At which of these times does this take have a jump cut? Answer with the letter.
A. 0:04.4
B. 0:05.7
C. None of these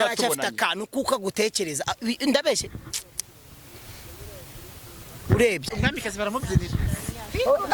B